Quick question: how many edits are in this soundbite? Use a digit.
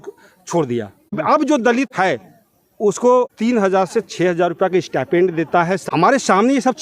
4